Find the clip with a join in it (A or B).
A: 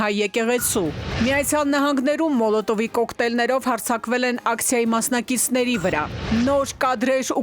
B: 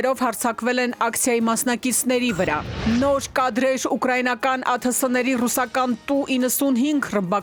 A